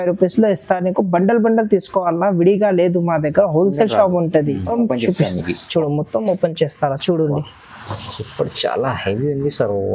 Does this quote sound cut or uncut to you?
cut